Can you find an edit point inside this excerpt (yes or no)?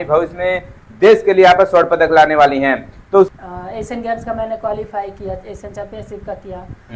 yes